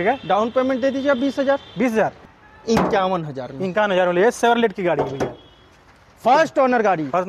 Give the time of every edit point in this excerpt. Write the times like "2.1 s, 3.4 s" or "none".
2.3 s